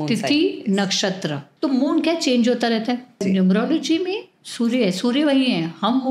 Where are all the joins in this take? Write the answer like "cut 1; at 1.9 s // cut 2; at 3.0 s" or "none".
cut 1; at 1.4 s // cut 2; at 3.2 s